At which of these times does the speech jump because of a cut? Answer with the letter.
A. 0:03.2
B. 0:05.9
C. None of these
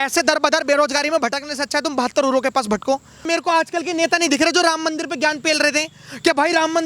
A